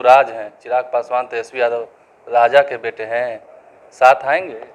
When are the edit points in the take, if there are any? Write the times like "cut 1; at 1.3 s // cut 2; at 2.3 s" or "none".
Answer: none